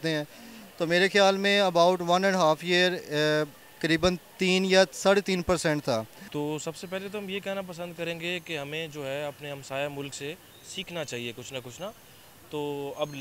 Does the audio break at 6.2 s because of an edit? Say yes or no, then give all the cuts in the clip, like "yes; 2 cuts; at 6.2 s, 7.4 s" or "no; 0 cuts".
yes; 1 cut; at 6.2 s